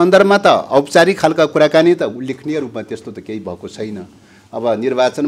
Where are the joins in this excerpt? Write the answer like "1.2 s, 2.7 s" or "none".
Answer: none

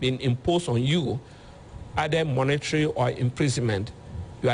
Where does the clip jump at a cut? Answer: none

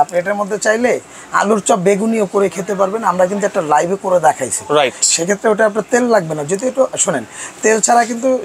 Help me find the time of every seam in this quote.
none

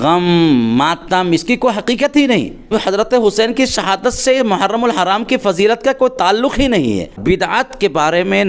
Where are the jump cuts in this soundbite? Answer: 2.6 s, 7.2 s

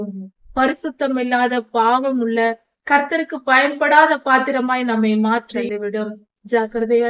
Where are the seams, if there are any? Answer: 5.7 s

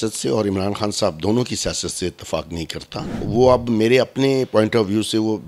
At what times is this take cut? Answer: 3.1 s

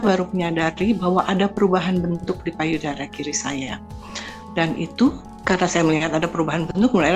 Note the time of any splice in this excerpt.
5.3 s

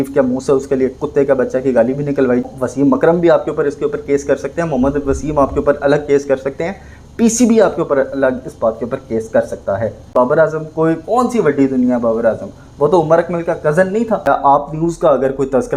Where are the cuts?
2.5 s, 10.0 s, 14.3 s

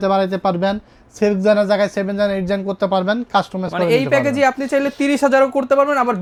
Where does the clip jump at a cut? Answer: none

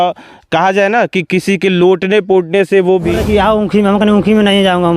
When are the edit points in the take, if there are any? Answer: 3.2 s

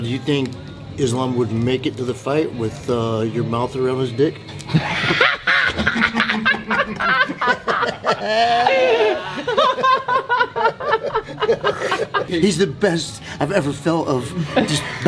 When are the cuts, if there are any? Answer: none

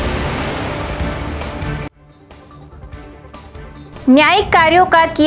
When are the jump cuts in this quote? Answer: 3.5 s

